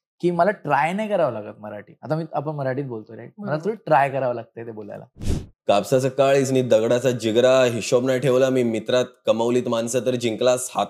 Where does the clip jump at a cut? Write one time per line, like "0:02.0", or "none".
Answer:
0:05.2